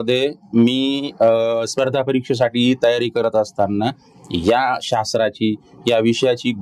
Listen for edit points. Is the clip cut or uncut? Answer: uncut